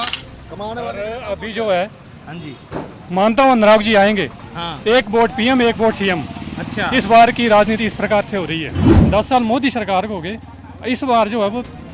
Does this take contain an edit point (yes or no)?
yes